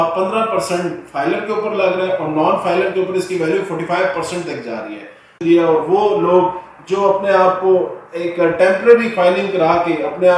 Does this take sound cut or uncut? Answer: cut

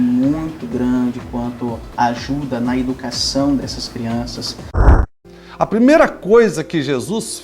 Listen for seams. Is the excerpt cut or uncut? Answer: cut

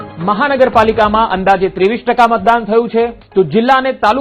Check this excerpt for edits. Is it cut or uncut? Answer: cut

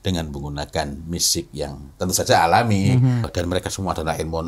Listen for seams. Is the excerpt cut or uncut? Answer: cut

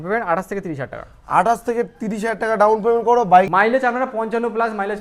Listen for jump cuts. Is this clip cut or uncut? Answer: cut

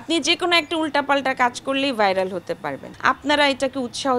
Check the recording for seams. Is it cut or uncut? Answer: cut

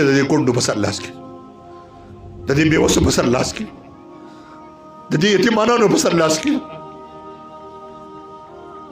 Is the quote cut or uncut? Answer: cut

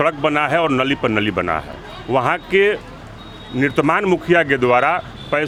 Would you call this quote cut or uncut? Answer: uncut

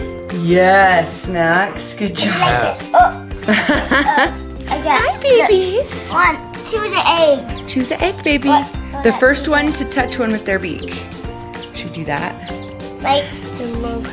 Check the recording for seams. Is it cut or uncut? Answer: cut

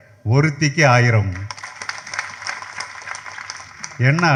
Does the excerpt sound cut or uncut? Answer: uncut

